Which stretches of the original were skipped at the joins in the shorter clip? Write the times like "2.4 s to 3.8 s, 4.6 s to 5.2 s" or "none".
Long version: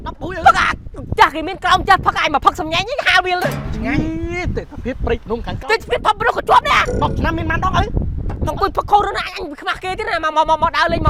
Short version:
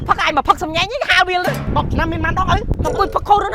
3.7 s to 7.0 s, 8.0 s to 8.3 s